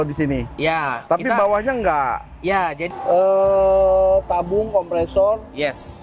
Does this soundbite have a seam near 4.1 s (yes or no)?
no